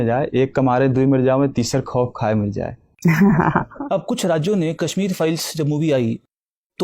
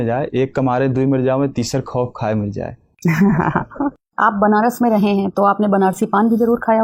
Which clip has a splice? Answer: first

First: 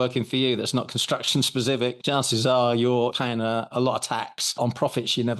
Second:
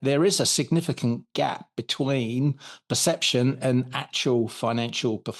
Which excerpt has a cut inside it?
first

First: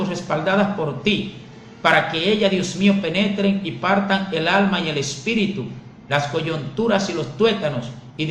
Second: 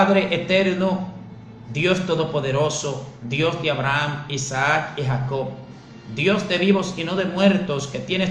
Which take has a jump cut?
first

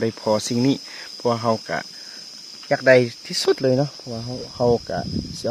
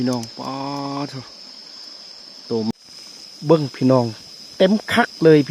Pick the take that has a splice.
second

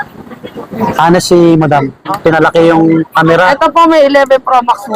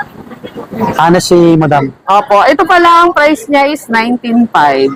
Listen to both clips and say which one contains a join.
first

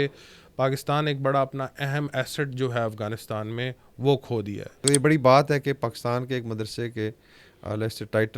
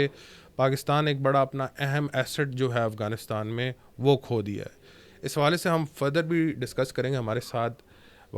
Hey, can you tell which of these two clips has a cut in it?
first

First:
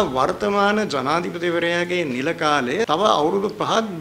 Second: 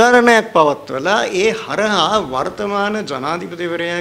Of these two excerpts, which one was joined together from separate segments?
first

